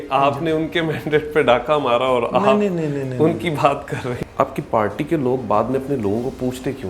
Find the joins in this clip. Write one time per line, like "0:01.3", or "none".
0:04.2

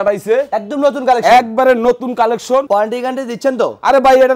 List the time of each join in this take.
0:02.7

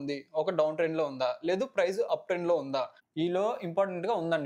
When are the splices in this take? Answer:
0:03.0

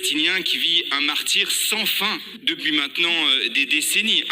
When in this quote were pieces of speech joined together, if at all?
0:02.3

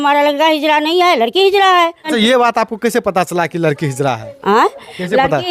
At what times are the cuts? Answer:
0:02.1

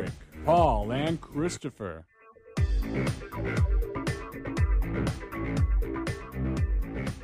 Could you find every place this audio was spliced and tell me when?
0:06.3

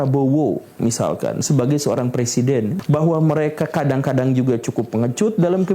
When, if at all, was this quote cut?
0:02.7

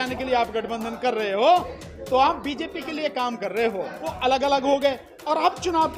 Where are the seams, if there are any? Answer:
0:04.0

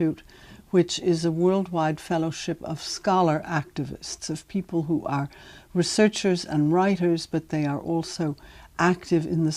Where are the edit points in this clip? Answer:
0:03.7

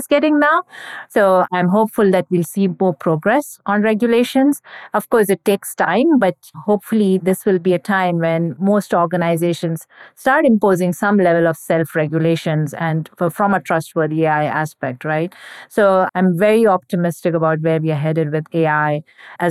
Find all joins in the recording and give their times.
0:01.5

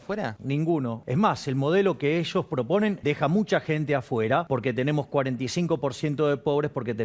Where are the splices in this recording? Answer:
0:00.8
0:03.0
0:04.5

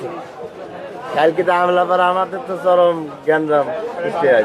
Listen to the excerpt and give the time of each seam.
none

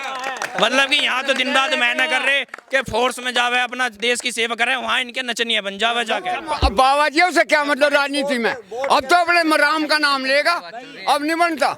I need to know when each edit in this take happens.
0:06.3

